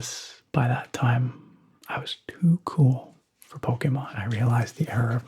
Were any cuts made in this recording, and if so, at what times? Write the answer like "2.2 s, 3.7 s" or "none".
4.3 s